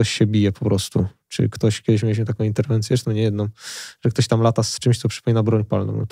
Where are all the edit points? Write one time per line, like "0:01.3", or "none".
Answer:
none